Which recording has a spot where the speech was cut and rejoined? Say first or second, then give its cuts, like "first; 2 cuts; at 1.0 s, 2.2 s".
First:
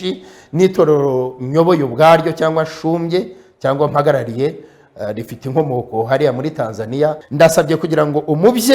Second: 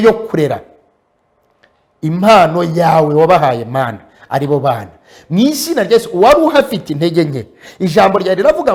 first; 1 cut; at 7.2 s